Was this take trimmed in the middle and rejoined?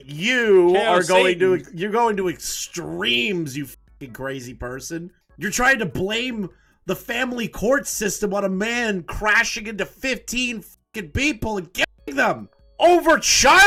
no; 0 cuts

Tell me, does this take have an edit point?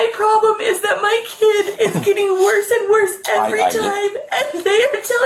no; 0 cuts

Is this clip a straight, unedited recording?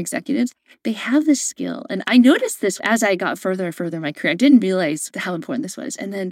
no; 1 cut; at 5.1 s

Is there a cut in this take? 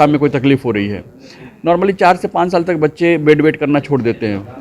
no; 0 cuts

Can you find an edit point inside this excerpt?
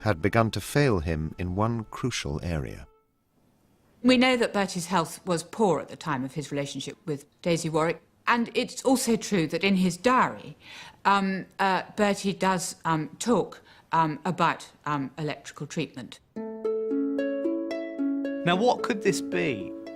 no; 0 cuts

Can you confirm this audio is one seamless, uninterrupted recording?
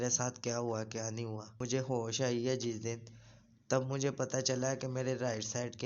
no; 1 cut; at 1.5 s

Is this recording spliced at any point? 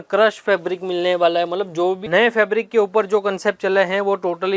yes; 1 cut; at 2.0 s

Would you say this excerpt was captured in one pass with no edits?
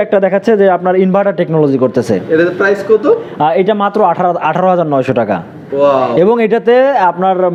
yes; 0 cuts

